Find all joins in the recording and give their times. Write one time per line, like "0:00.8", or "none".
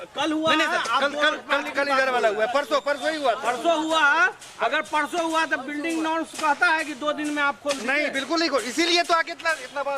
none